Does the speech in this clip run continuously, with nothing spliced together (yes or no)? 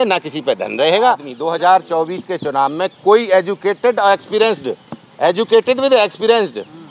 no